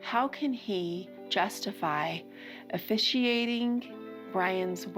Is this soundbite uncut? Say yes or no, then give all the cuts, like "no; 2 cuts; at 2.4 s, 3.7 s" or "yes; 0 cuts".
yes; 0 cuts